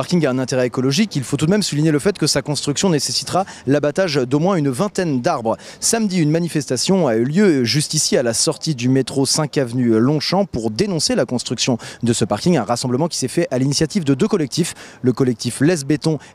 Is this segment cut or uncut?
uncut